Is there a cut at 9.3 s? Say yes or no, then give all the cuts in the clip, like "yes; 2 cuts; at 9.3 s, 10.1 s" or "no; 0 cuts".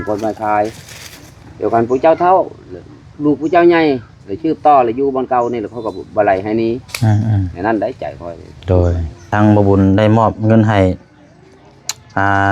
yes; 1 cut; at 9.3 s